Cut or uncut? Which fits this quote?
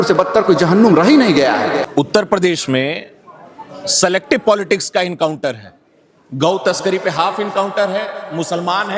cut